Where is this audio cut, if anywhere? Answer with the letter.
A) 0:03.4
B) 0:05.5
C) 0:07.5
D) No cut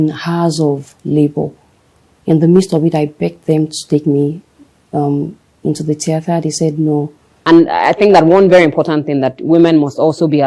C